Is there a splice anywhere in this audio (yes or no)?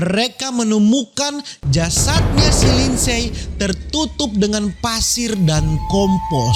no